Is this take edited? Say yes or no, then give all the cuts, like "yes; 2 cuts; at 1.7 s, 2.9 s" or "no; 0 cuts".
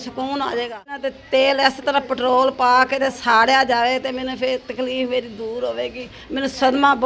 yes; 1 cut; at 1.0 s